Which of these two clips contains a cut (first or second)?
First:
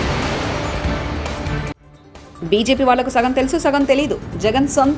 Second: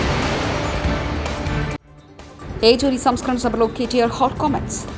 first